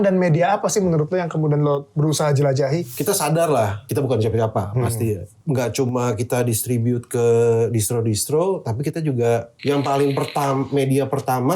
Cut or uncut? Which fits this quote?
cut